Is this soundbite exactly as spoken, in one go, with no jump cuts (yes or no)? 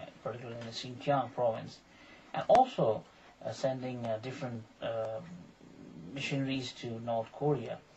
yes